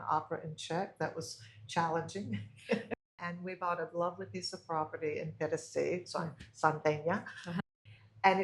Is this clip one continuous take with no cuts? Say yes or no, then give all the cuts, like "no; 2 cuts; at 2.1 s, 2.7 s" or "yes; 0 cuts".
no; 2 cuts; at 2.9 s, 7.6 s